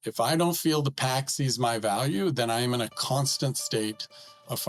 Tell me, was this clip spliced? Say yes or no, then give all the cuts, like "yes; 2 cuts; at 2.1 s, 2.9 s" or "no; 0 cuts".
no; 0 cuts